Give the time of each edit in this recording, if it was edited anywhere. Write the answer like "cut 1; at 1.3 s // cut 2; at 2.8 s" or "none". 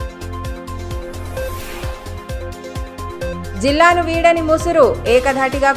cut 1; at 1.7 s